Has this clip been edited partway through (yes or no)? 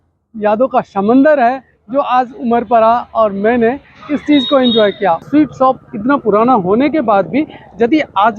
yes